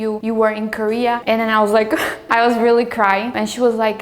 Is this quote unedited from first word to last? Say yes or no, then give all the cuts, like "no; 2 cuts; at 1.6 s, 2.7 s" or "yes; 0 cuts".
no; 2 cuts; at 1.2 s, 2.2 s